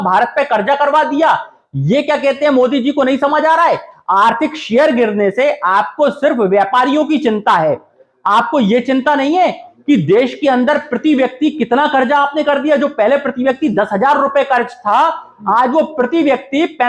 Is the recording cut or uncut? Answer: uncut